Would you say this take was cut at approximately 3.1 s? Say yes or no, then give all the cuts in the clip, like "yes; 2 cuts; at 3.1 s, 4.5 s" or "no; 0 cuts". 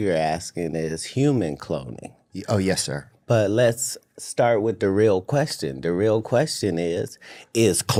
no; 0 cuts